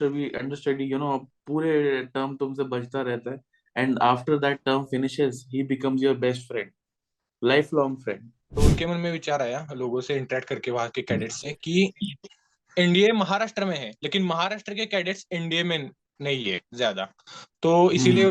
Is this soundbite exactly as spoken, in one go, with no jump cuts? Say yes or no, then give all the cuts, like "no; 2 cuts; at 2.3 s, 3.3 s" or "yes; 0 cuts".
no; 1 cut; at 8.4 s